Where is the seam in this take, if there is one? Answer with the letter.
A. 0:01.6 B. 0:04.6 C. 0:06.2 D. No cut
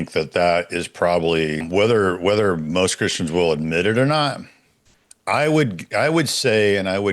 A